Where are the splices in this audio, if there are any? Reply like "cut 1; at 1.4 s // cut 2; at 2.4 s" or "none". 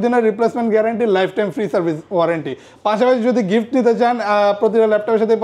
none